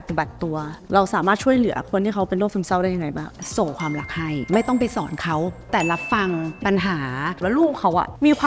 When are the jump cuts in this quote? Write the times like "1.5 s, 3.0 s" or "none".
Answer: 3.4 s, 4.4 s, 5.7 s, 7.4 s